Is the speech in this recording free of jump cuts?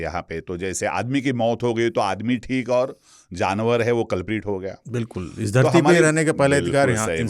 yes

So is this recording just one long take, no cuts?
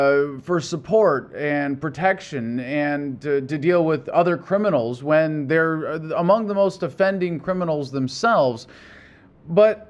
yes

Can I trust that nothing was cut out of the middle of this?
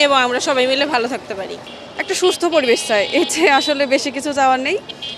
no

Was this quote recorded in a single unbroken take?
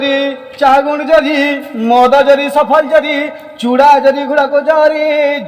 yes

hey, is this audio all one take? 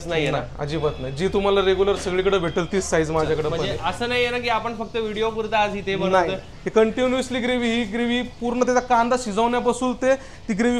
no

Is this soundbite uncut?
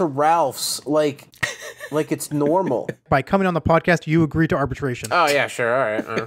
no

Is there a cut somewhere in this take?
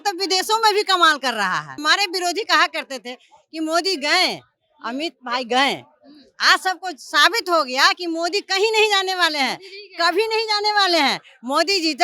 yes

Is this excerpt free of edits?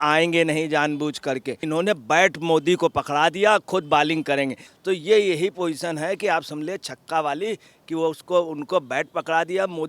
no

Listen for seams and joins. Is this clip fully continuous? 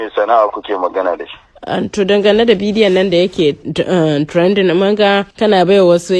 yes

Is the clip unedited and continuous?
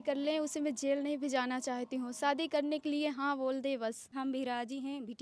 no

